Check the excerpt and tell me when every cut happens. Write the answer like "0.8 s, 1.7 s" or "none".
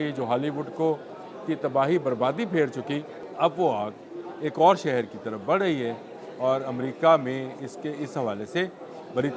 3.2 s